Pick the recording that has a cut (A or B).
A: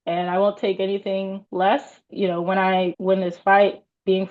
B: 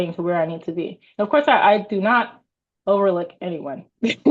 A